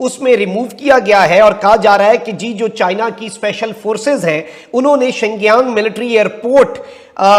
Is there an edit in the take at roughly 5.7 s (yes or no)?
no